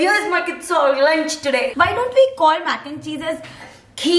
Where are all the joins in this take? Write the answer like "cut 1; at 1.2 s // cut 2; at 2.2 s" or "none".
cut 1; at 1.7 s

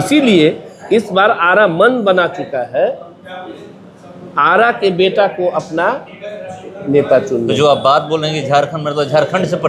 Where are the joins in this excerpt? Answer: none

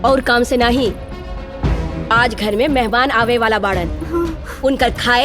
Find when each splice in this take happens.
none

